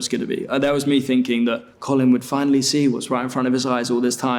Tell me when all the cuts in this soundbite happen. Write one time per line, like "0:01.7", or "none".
0:01.7